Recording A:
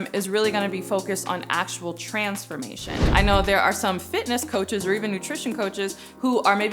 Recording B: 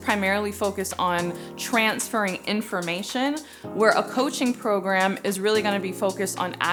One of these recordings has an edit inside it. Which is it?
A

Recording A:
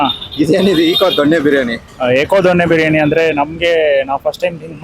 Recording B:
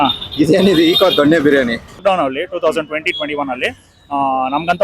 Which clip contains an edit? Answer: B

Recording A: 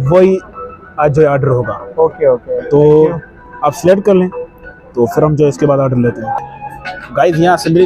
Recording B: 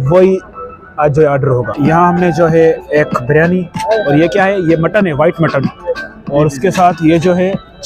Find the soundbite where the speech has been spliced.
B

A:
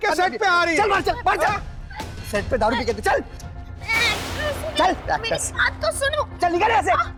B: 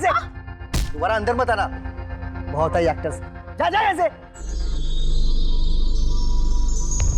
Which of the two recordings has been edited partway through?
B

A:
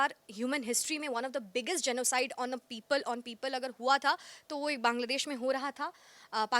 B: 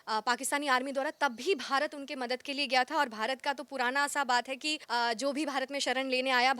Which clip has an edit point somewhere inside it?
B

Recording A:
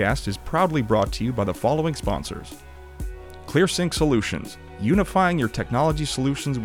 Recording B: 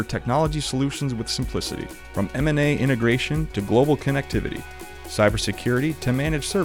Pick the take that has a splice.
A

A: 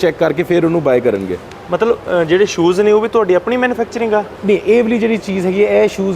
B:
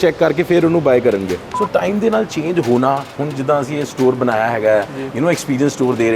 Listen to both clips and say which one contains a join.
B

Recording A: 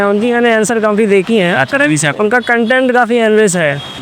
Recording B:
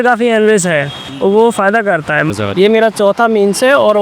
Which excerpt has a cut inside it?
B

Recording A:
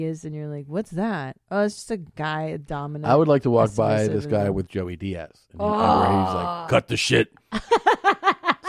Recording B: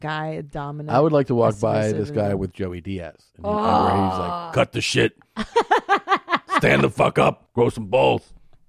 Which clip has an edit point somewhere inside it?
B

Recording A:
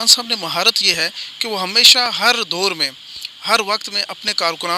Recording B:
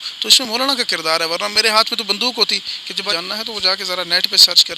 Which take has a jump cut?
B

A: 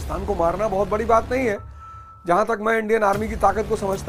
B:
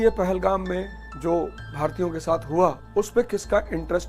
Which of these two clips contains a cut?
B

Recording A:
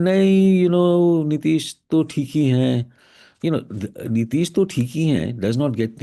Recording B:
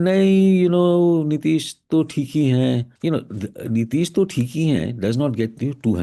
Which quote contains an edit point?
B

